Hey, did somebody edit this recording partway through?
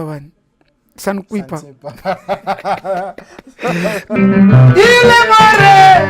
yes; 1 cut; at 4.1 s

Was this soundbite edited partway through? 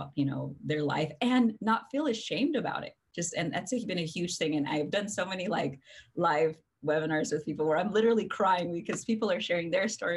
no; 0 cuts

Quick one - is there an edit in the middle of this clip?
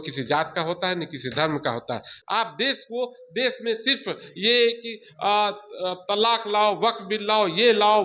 yes; 1 cut; at 2.1 s

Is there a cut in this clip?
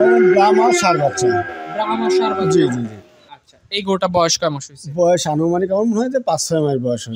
no; 0 cuts

